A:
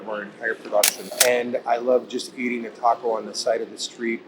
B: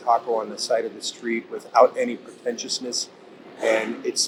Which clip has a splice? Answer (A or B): A